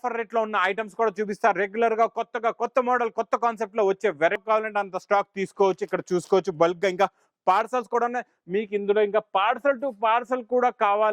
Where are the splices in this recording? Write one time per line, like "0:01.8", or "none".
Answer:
0:04.4

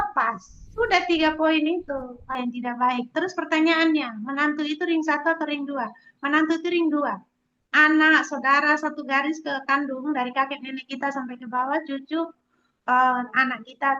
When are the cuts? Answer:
0:02.3

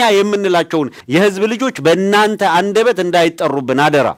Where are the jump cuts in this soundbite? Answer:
none

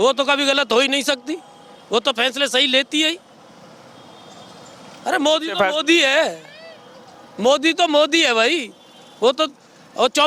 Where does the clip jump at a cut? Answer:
none

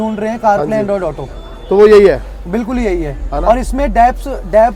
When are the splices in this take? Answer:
none

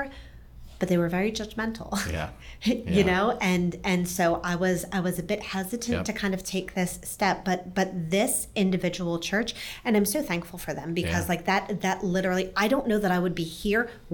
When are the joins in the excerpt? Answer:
none

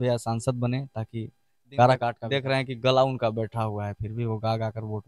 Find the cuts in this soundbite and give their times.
0:02.2

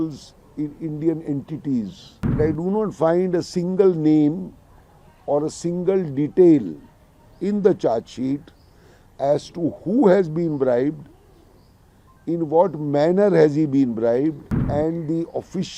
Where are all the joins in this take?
0:02.4
0:14.5

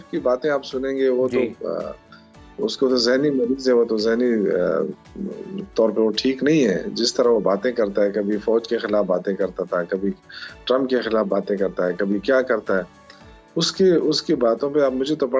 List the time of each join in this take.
none

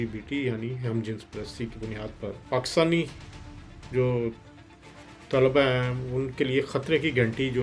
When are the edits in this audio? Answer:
0:02.4

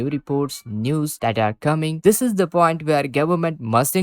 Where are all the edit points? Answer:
0:01.9

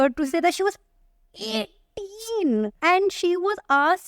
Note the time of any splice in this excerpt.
0:02.8

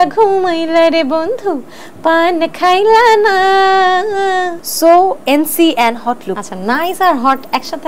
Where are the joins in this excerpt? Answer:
0:04.6
0:06.3

